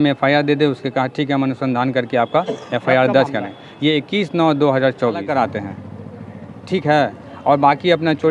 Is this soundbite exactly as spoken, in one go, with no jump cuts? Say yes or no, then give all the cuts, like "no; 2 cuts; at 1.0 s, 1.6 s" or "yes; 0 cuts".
no; 1 cut; at 5.2 s